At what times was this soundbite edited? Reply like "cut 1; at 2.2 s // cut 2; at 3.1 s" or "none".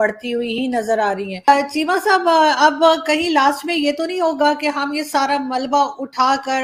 none